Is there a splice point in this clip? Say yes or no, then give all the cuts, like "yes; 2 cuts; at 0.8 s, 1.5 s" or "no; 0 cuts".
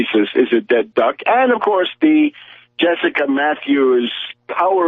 yes; 1 cut; at 2.4 s